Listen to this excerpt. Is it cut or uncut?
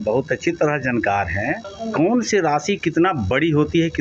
cut